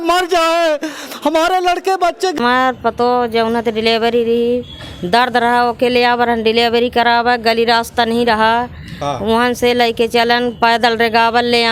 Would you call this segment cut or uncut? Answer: cut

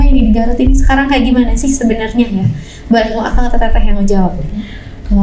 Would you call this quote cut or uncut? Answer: uncut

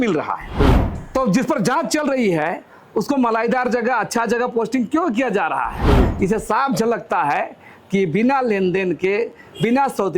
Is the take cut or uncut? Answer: cut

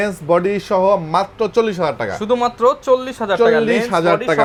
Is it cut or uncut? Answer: uncut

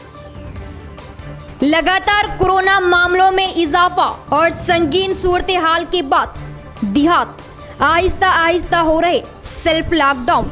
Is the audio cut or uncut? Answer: uncut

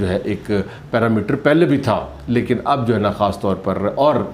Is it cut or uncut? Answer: uncut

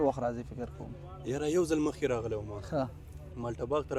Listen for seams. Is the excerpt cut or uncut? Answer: uncut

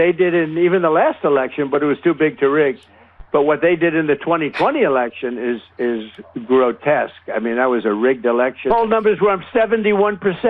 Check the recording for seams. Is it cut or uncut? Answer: cut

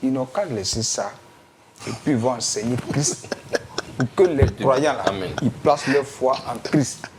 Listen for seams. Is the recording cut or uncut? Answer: uncut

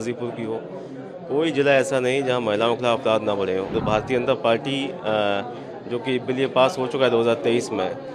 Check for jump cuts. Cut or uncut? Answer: cut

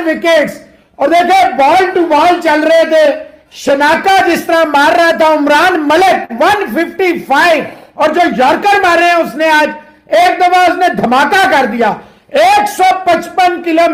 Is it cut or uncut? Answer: uncut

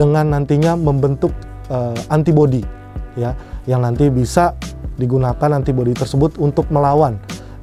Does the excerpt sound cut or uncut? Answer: uncut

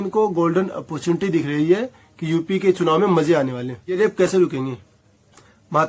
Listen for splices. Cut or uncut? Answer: cut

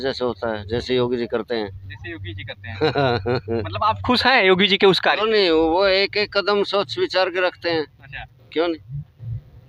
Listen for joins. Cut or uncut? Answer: uncut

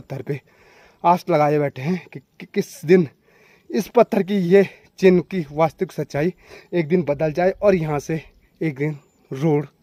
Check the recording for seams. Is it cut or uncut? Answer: uncut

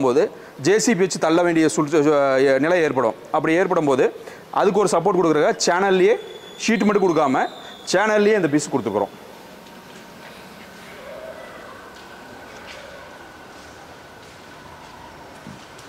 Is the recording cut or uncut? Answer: uncut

